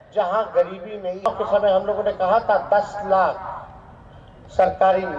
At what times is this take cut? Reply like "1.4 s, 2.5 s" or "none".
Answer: 1.3 s